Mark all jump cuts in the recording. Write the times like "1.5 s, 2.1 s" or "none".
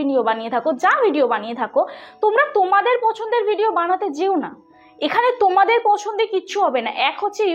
none